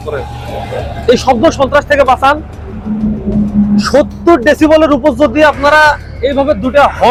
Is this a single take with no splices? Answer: yes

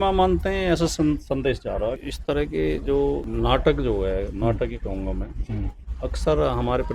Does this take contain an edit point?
yes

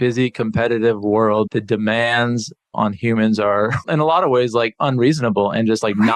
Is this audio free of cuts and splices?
no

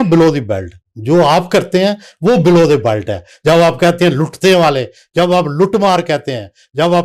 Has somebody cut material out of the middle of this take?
no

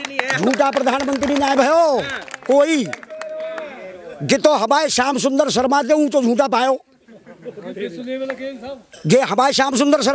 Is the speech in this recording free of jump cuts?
yes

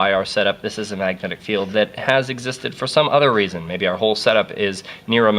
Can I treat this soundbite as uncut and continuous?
no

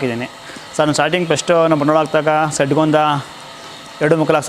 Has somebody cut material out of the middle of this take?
no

